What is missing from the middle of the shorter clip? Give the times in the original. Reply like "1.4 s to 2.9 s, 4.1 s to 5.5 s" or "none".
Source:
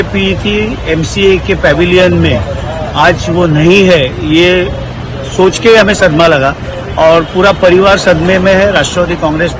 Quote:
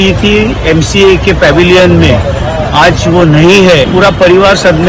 4.1 s to 7.3 s